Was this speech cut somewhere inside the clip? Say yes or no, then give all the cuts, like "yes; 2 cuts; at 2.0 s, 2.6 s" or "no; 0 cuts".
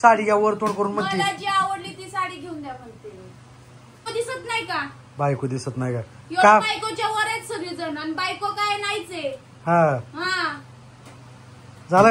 yes; 1 cut; at 4.1 s